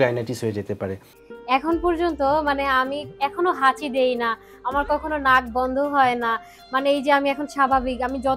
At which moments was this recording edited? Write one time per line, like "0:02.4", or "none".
0:01.2